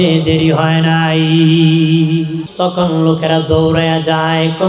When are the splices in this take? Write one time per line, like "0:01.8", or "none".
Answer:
0:02.4